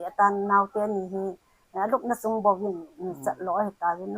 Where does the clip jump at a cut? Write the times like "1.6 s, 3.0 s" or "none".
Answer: none